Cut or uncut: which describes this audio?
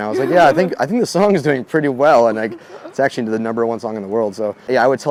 uncut